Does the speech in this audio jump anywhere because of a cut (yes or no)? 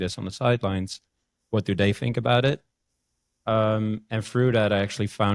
no